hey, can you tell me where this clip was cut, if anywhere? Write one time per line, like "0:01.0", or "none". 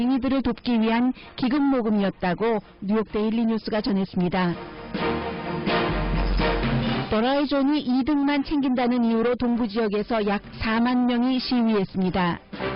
0:01.8